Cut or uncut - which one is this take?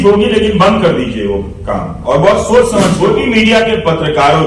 cut